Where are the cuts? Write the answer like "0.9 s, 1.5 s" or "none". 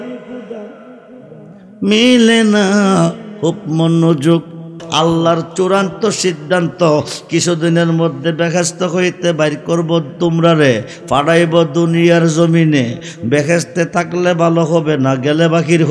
4.8 s

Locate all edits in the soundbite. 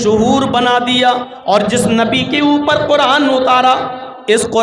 1.3 s

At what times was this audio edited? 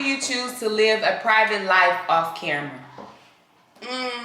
none

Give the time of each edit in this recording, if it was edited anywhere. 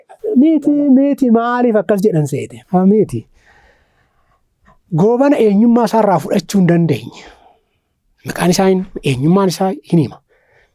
none

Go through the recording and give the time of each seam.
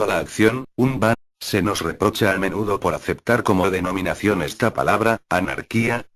none

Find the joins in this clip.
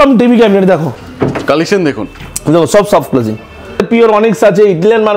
1.0 s, 3.9 s

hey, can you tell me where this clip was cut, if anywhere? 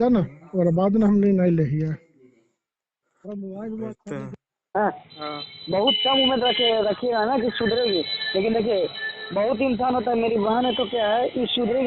4.7 s

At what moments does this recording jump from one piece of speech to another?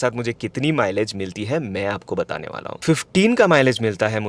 none

